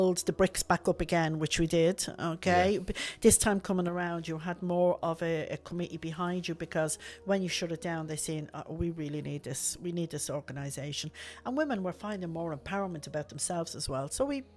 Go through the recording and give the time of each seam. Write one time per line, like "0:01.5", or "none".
none